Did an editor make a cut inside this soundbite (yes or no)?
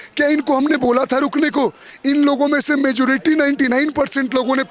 no